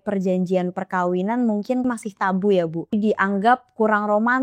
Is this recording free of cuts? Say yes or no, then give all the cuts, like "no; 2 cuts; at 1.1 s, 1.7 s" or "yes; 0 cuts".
no; 2 cuts; at 1.8 s, 2.9 s